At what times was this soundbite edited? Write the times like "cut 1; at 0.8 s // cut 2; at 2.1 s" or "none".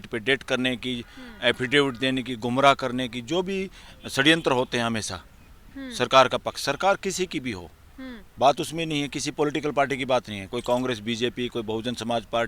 none